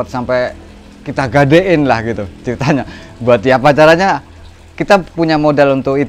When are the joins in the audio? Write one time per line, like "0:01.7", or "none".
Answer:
none